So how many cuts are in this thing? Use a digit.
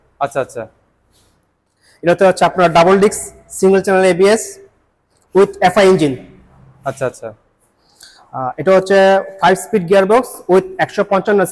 0